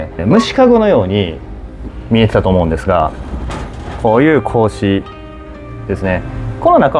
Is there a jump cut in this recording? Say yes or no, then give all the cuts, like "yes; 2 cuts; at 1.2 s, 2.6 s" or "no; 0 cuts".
no; 0 cuts